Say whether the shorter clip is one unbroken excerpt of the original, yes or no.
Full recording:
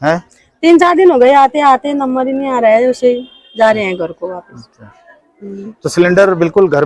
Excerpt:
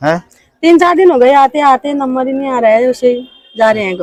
yes